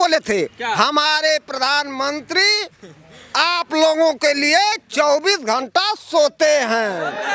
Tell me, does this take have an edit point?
no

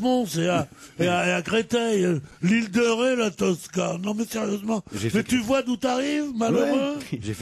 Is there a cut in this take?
no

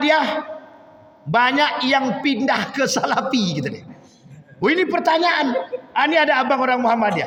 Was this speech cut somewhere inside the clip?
no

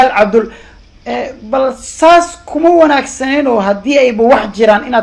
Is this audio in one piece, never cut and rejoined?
yes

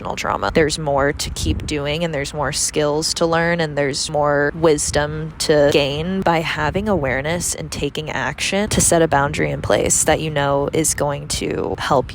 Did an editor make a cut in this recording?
yes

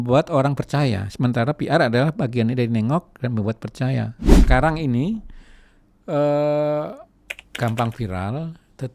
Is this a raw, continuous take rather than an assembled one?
no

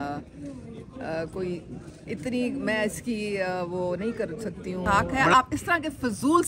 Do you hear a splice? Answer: yes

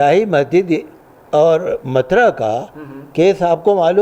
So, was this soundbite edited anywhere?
no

